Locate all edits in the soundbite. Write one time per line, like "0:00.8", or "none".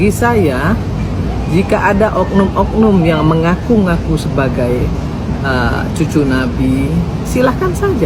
none